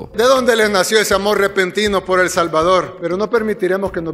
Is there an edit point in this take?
no; 0 cuts

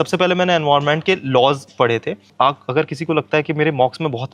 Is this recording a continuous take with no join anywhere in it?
no; 1 cut; at 2.3 s

